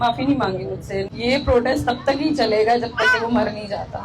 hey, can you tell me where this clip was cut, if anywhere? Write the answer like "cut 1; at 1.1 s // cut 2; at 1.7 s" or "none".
cut 1; at 1.1 s

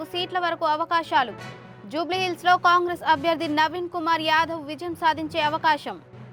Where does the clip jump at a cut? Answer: none

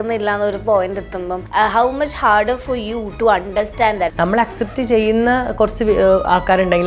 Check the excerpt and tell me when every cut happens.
cut 1; at 1.4 s // cut 2; at 4.1 s

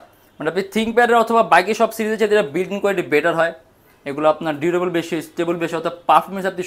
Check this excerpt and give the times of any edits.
none

